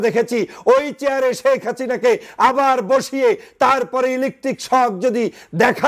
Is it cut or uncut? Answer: uncut